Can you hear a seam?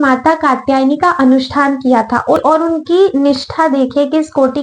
yes; 1 cut; at 2.4 s

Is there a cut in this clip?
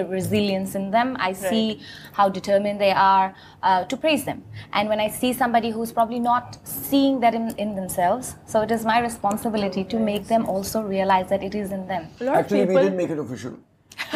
yes; 1 cut; at 12.1 s

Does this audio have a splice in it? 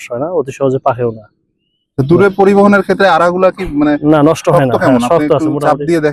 no; 0 cuts

